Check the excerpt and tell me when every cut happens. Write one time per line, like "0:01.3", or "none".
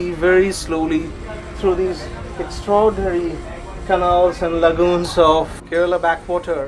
0:05.6